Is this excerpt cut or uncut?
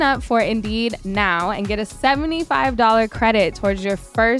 uncut